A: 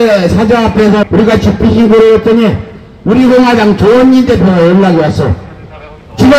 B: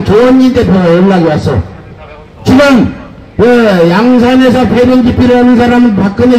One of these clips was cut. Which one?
A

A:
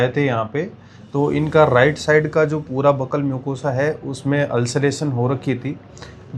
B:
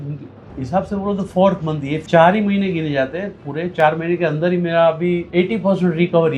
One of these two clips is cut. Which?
B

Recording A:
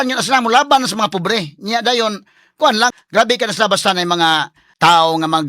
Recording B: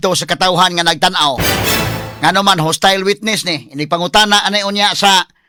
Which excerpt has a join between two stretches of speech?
A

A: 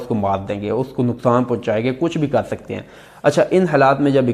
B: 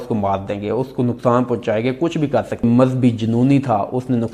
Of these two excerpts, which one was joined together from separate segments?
B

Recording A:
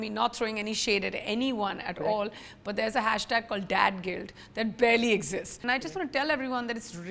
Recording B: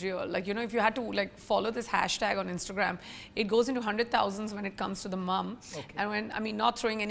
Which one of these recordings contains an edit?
A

